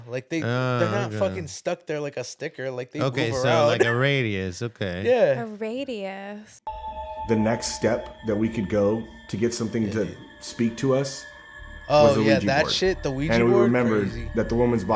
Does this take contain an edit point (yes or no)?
yes